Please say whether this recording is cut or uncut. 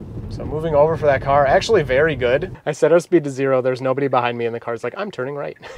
cut